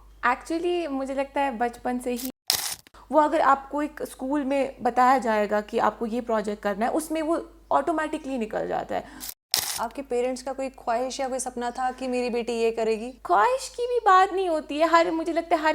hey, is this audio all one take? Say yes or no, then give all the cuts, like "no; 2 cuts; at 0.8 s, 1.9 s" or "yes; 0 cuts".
no; 2 cuts; at 2.4 s, 9.4 s